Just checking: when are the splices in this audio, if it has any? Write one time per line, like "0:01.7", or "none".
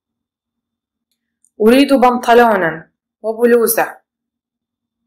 0:01.0